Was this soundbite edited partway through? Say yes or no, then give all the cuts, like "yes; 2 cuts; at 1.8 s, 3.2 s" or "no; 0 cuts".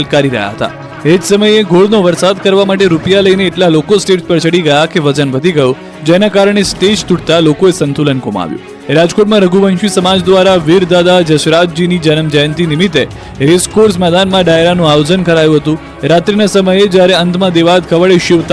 no; 0 cuts